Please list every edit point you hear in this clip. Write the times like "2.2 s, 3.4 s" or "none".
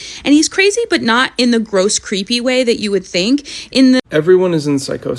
4.0 s